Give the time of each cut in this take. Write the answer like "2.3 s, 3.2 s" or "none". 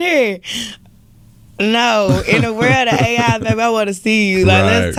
none

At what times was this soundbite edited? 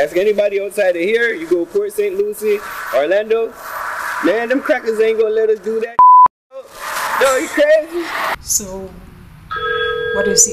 8.3 s

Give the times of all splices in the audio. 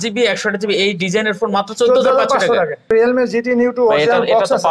2.9 s

